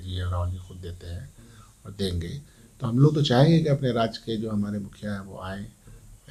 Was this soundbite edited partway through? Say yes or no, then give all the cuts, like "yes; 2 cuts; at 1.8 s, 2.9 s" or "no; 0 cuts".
no; 0 cuts